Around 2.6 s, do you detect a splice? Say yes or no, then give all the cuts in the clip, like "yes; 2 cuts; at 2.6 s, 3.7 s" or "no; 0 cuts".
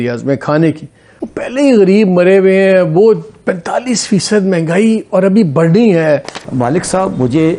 no; 1 cut; at 6.4 s